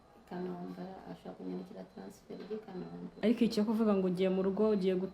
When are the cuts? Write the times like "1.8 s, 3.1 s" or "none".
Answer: 3.1 s